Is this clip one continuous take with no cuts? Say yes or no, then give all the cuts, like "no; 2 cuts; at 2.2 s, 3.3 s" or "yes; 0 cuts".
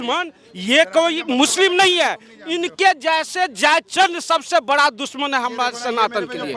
yes; 0 cuts